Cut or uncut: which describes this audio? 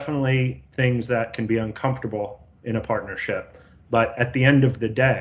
uncut